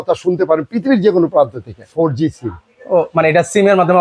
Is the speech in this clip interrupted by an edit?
yes; 1 cut; at 1.9 s

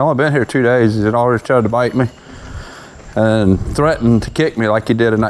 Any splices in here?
no; 0 cuts

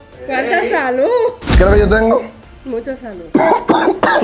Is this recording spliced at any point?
yes; 1 cut; at 1.4 s

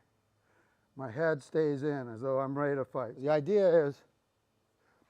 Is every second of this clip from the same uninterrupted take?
no; 1 cut; at 3.1 s

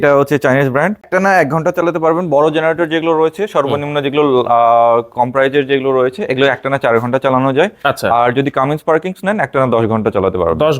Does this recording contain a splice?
yes; 1 cut; at 1.1 s

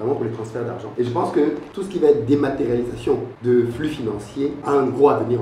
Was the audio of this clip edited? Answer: yes; 4 cuts; at 0.9 s, 1.7 s, 3.3 s, 4.6 s

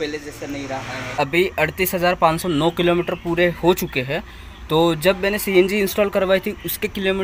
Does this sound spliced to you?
yes; 1 cut; at 1.2 s

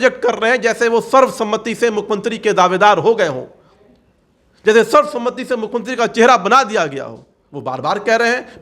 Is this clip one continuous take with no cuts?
yes; 0 cuts

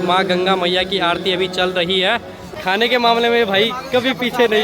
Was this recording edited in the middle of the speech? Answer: yes; 1 cut; at 2.4 s

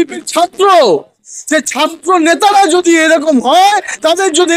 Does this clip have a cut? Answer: no; 0 cuts

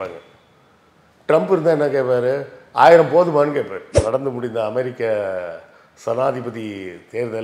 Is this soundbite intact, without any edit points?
no; 1 cut; at 4.0 s

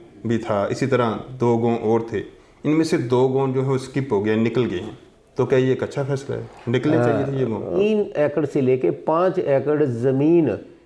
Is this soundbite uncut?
no; 1 cut; at 7.7 s

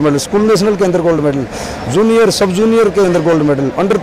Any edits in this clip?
no; 0 cuts

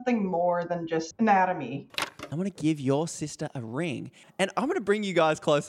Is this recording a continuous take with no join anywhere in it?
no; 3 cuts; at 1.1 s, 1.9 s, 4.4 s

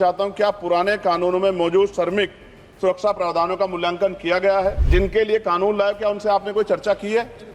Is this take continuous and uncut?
no; 1 cut; at 4.8 s

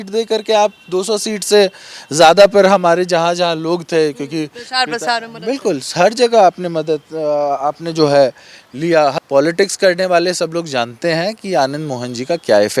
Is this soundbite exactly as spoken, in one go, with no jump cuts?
no; 1 cut; at 9.1 s

